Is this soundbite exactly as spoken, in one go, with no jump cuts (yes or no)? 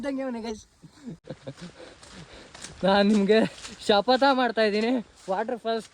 no